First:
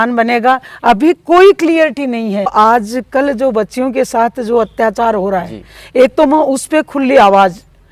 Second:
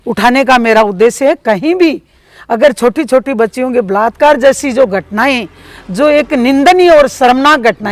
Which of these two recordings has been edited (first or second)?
first